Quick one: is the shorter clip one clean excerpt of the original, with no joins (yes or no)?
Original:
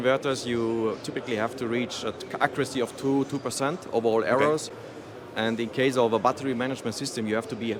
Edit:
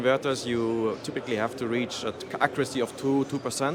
yes